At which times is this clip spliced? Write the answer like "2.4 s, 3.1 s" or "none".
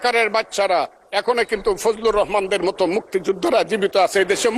none